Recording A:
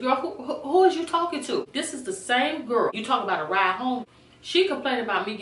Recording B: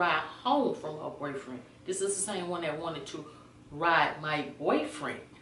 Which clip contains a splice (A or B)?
A